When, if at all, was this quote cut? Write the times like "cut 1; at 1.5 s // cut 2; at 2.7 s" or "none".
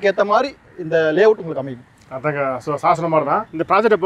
none